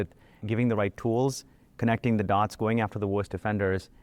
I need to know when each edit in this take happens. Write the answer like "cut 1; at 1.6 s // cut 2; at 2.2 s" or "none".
none